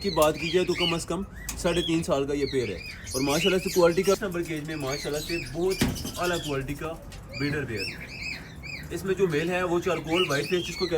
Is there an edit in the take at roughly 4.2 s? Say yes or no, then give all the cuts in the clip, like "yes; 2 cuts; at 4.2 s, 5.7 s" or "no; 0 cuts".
yes; 1 cut; at 4.2 s